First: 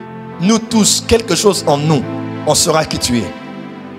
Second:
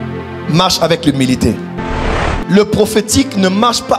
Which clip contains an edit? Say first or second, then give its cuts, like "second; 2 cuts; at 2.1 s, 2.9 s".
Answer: second; 1 cut; at 2.1 s